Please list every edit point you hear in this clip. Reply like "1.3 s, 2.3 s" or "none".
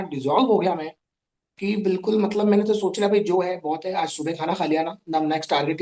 none